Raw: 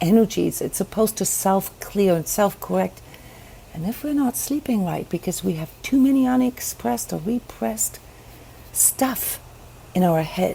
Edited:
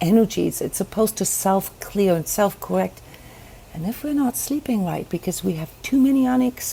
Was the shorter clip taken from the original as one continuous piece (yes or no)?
yes